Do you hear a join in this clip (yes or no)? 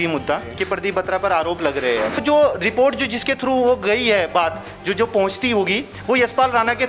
yes